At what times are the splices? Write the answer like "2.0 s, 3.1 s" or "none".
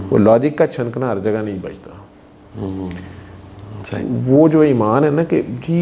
none